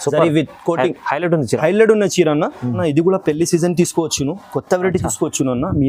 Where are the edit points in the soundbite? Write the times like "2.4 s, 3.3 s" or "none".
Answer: 2.8 s